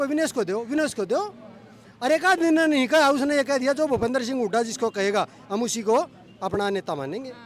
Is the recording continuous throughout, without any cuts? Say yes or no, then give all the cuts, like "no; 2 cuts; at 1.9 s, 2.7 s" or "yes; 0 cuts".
yes; 0 cuts